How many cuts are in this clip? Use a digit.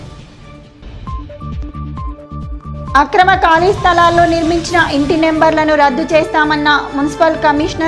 1